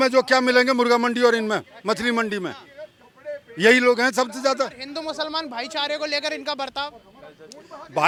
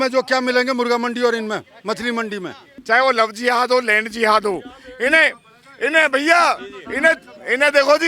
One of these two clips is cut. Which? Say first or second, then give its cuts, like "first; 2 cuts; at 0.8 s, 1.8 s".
second; 1 cut; at 2.7 s